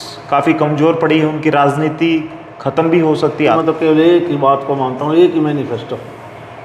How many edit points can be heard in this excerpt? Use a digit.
1